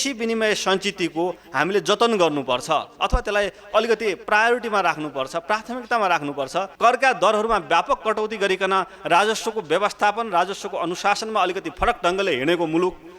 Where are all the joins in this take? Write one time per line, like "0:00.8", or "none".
0:06.7